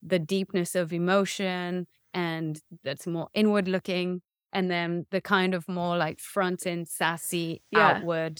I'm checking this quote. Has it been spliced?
no; 0 cuts

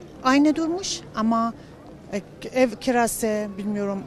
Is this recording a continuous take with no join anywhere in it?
yes; 0 cuts

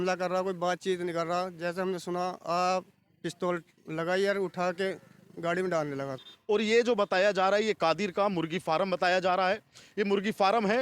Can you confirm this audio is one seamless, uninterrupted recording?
no; 1 cut; at 6.3 s

